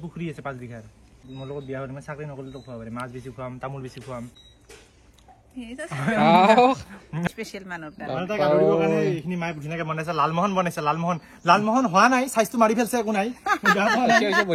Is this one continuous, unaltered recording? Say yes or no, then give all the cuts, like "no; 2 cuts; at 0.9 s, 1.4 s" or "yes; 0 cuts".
no; 3 cuts; at 1.2 s, 4.4 s, 7.2 s